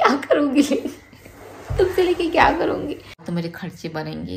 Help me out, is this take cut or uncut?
cut